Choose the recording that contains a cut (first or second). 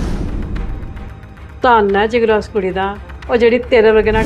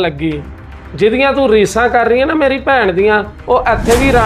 first